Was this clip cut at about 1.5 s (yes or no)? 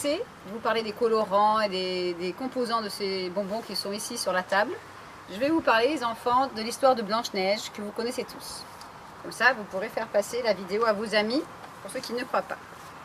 no